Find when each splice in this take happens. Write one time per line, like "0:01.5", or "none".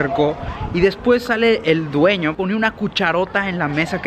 0:02.3